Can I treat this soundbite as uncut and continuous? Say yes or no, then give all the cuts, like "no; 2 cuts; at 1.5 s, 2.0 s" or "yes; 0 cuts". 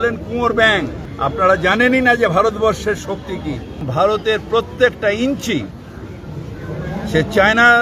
no; 2 cuts; at 1.0 s, 3.8 s